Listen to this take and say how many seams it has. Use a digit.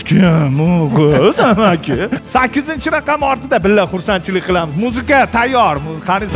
1